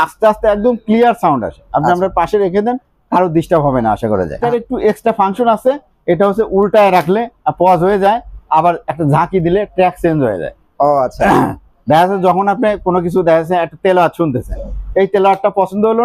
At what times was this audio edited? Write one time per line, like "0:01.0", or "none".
0:04.4